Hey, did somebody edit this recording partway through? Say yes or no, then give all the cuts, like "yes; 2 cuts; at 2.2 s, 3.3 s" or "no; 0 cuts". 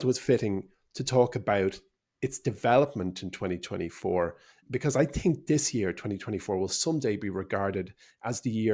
yes; 1 cut; at 4.6 s